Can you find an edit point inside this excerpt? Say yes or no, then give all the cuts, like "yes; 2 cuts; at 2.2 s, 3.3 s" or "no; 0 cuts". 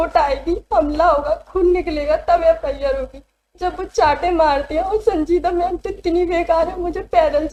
no; 0 cuts